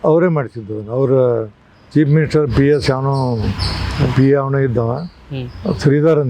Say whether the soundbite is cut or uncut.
uncut